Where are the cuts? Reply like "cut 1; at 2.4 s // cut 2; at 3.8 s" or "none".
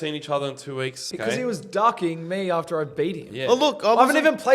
cut 1; at 1.0 s